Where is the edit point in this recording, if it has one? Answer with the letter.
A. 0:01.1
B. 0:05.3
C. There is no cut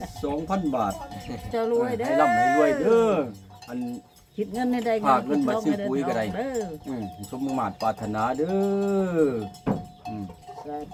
C